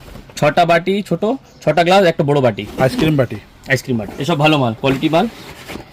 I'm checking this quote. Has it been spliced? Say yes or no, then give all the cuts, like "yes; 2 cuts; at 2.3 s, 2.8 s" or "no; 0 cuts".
yes; 1 cut; at 4.1 s